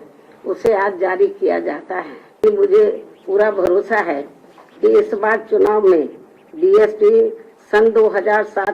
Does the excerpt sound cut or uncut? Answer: cut